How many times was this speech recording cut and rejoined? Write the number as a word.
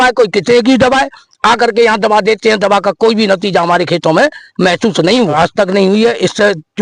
one